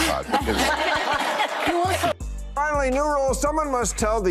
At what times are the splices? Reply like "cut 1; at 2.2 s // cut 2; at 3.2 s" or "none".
cut 1; at 2.2 s